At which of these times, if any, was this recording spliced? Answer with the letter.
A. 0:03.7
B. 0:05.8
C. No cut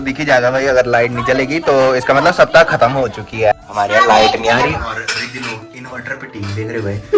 A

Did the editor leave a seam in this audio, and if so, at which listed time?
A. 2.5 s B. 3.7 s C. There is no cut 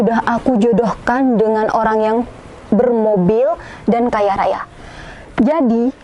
C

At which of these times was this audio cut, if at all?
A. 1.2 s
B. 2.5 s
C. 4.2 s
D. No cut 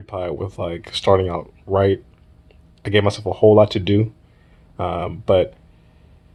D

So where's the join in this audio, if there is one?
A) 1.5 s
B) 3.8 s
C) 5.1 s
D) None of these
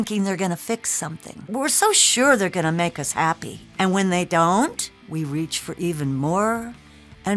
A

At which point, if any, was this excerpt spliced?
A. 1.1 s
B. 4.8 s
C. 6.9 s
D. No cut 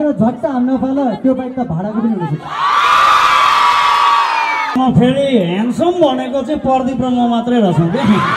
B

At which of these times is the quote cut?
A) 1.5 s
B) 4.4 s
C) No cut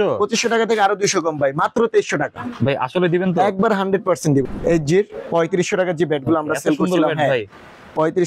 B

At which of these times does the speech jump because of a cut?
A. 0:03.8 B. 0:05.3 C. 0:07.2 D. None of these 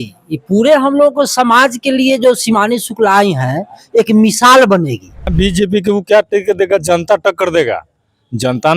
B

